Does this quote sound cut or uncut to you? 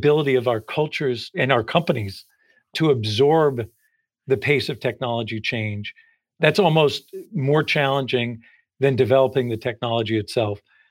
cut